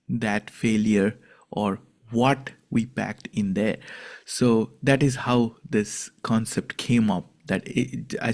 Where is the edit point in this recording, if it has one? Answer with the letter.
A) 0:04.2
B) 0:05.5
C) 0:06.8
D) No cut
D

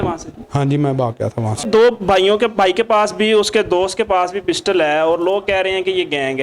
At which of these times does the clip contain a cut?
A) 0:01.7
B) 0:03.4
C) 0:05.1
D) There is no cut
A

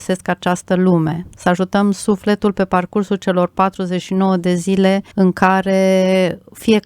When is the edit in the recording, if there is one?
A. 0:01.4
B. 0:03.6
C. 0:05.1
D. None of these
C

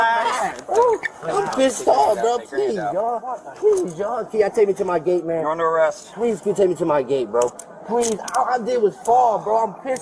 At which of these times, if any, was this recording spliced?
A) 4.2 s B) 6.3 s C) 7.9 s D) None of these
D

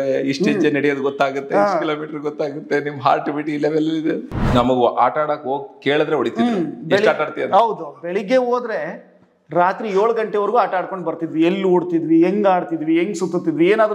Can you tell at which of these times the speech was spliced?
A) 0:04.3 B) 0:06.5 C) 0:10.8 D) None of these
A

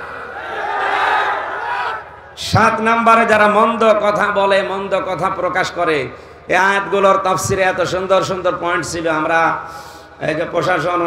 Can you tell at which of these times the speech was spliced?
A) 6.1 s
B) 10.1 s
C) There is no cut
C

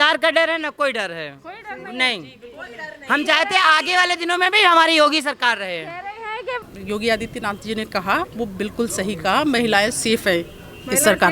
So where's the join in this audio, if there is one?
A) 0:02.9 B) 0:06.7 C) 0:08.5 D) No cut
B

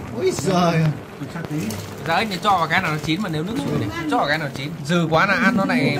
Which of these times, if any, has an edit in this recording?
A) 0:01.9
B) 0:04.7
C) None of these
B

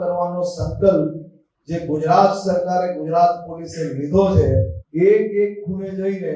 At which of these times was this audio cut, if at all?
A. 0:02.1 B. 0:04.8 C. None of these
B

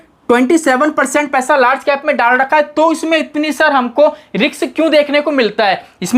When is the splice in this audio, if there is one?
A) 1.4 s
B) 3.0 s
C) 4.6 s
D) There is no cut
D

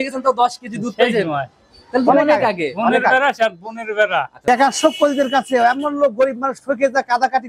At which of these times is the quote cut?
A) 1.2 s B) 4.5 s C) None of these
B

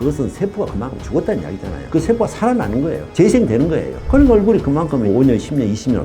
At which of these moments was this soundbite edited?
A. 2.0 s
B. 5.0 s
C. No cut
C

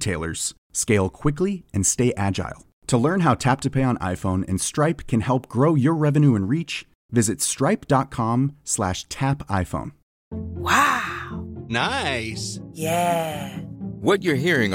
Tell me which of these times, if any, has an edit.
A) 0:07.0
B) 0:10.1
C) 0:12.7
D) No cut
B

